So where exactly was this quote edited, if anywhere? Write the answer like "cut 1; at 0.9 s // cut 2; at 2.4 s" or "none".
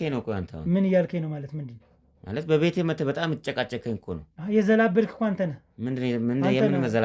none